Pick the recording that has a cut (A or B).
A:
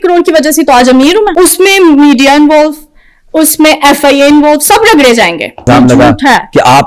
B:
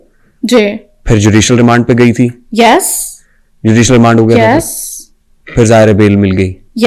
A